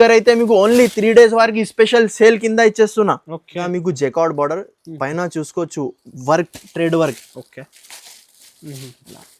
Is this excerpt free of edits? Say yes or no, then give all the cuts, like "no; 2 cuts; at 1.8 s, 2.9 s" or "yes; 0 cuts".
no; 1 cut; at 3.6 s